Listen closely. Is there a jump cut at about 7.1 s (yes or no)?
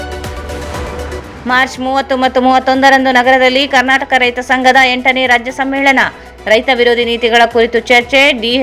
no